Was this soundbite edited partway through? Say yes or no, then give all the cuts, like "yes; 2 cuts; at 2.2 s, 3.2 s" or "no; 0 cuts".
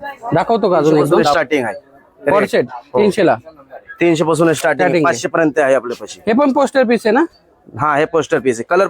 yes; 1 cut; at 1.4 s